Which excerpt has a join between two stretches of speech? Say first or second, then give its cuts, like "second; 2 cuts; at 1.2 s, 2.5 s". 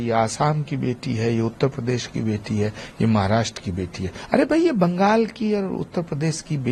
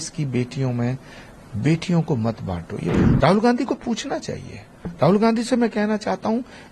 second; 1 cut; at 3.0 s